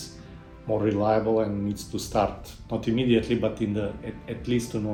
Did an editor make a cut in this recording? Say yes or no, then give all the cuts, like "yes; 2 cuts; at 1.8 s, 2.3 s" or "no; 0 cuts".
no; 0 cuts